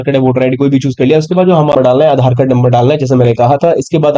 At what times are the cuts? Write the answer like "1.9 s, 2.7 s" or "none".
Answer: 1.7 s

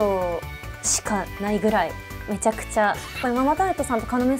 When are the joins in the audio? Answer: 3.2 s

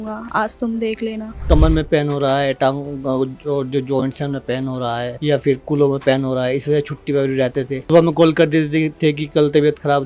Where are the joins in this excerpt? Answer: 1.4 s, 5.1 s, 7.8 s

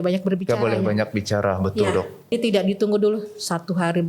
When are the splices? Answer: 2.3 s

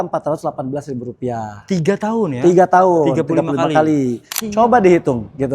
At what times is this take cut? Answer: 4.3 s

